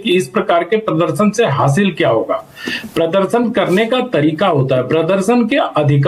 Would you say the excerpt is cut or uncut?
uncut